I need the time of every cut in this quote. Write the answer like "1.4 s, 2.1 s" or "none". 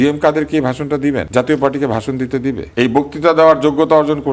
1.3 s, 2.6 s